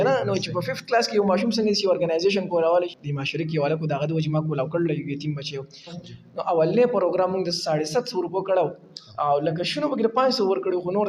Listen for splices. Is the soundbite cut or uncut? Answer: cut